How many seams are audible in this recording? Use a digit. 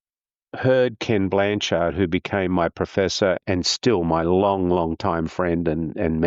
1